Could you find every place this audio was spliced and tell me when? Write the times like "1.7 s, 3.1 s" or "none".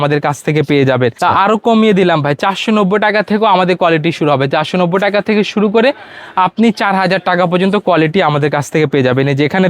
none